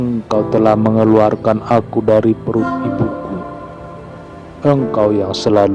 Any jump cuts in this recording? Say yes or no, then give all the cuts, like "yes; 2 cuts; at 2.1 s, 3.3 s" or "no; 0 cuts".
yes; 2 cuts; at 3.1 s, 4.6 s